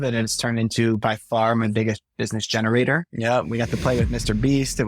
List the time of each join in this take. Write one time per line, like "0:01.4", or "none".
0:03.1